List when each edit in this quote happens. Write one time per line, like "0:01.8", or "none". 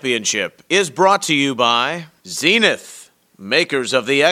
0:02.0